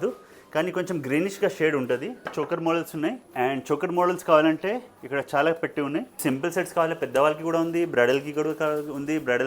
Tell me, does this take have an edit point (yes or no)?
yes